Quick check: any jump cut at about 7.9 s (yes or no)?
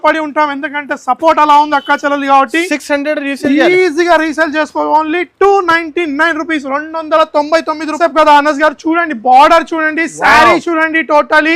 yes